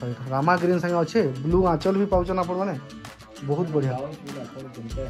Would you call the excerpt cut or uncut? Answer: uncut